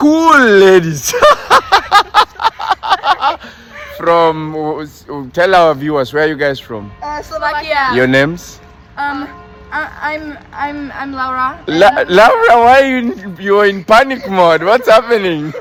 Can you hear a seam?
no; 0 cuts

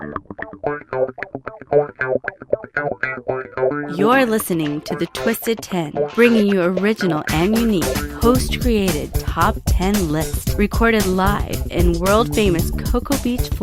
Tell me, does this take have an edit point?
no; 0 cuts

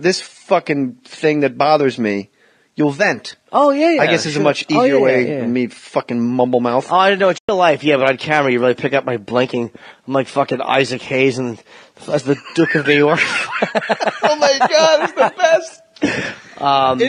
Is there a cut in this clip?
no; 0 cuts

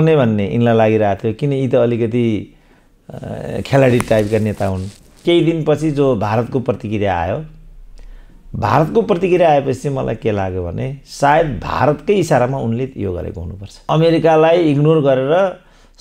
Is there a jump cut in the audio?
yes; 2 cuts; at 5.2 s, 13.9 s

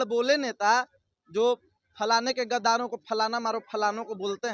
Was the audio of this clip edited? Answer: no; 0 cuts

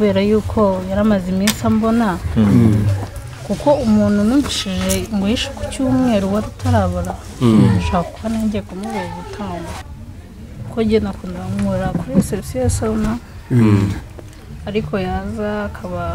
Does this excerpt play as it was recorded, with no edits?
no; 1 cut; at 9.8 s

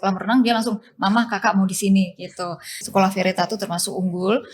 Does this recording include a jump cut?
yes; 1 cut; at 2.8 s

